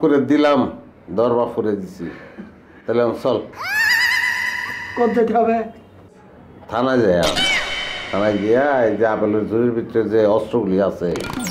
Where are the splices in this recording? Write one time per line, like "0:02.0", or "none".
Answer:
none